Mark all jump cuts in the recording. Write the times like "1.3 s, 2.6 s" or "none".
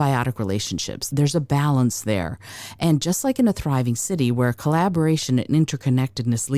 1.0 s